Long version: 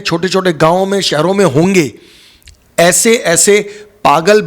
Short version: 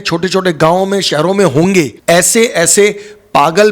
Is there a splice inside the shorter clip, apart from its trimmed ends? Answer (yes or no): yes